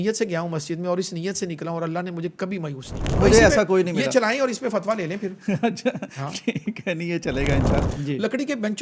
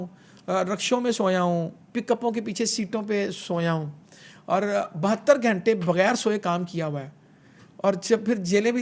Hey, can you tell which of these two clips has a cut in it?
first; 2 cuts; at 3.2 s, 7.8 s

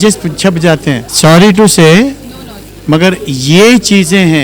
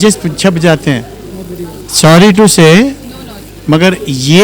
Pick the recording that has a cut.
first; 1 cut; at 1.1 s

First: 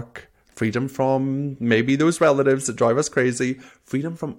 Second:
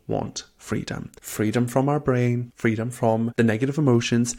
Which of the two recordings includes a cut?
second; 3 cuts; at 1.2 s, 2.5 s, 3.3 s

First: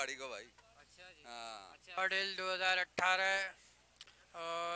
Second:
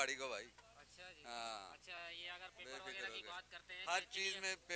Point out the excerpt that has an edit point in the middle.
first; 1 cut; at 2.0 s

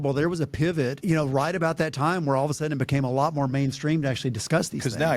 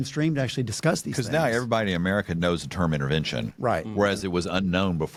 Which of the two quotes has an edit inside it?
first; 1 cut; at 1.0 s

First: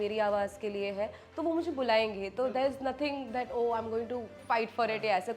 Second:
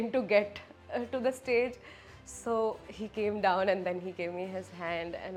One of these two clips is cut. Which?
first; 1 cut; at 4.4 s

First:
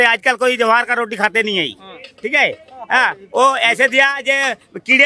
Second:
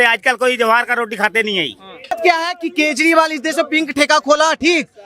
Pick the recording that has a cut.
second; 1 cut; at 2.1 s

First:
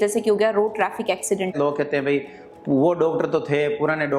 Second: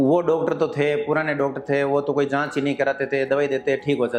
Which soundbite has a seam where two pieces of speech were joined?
first; 1 cut; at 1.5 s

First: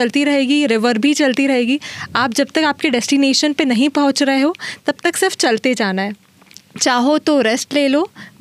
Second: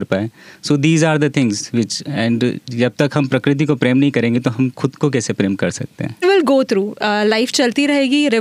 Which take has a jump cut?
second; 1 cut; at 6.2 s

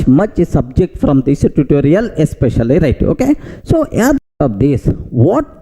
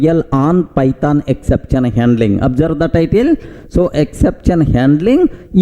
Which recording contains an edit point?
first; 1 cut; at 4.3 s

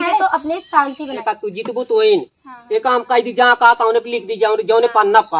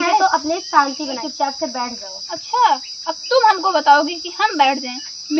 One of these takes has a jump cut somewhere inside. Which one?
first; 1 cut; at 1.1 s

